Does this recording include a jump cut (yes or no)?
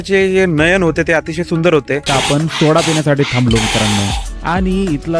yes